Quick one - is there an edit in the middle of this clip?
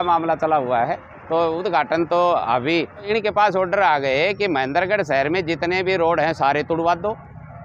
yes; 1 cut; at 3.1 s

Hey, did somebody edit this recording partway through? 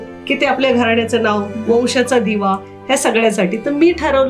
no; 0 cuts

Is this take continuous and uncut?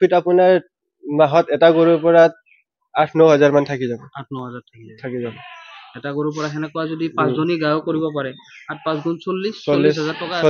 yes; 0 cuts

